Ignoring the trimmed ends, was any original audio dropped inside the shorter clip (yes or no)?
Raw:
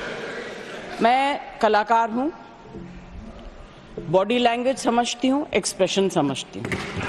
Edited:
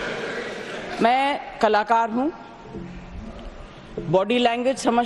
no